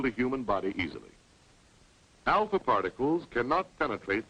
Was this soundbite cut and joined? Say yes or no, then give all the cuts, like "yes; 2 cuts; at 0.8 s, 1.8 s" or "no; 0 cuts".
no; 0 cuts